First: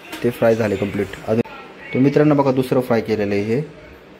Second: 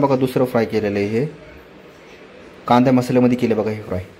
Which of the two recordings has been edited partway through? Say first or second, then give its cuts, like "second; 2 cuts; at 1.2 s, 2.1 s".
first; 1 cut; at 1.4 s